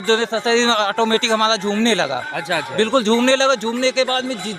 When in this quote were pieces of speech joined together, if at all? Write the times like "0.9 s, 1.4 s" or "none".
none